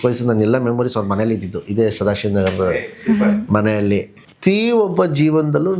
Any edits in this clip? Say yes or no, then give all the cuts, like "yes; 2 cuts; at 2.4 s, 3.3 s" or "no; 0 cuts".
yes; 1 cut; at 4.2 s